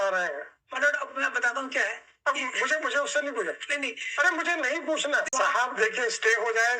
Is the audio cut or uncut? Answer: cut